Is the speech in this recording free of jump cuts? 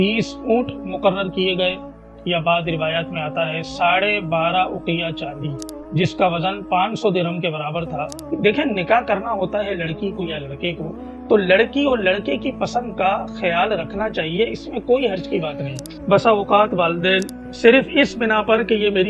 no; 2 cuts; at 8.1 s, 15.9 s

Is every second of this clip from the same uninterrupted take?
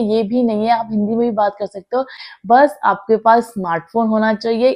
no; 1 cut; at 2.2 s

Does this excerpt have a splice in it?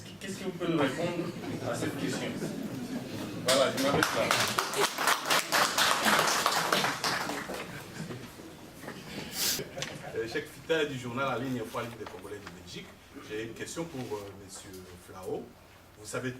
no; 0 cuts

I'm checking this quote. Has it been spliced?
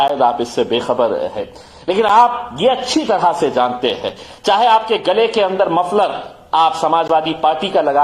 no; 0 cuts

